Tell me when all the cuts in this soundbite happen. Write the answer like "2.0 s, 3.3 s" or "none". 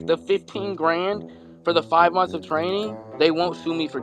3.0 s